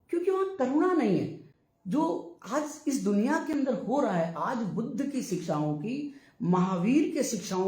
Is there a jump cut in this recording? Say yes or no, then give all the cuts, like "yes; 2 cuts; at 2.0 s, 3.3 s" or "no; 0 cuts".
no; 0 cuts